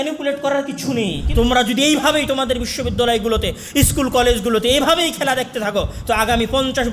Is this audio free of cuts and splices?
no; 1 cut; at 1.2 s

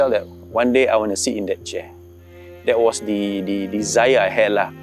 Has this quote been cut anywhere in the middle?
no; 0 cuts

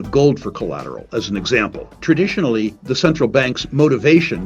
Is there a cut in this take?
yes; 2 cuts; at 2.0 s, 2.8 s

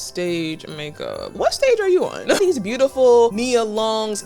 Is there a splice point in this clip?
yes; 3 cuts; at 1.3 s, 2.4 s, 3.3 s

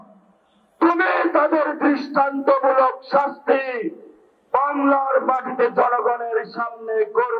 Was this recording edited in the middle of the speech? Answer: no; 0 cuts

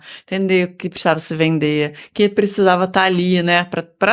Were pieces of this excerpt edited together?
no; 0 cuts

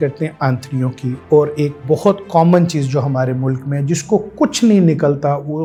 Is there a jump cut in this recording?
no; 0 cuts

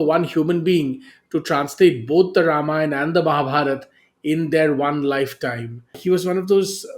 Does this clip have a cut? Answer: yes; 1 cut; at 6.0 s

